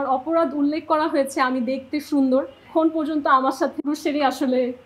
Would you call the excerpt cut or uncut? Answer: cut